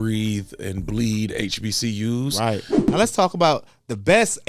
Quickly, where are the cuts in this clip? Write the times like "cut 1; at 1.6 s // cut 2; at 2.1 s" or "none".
cut 1; at 2.7 s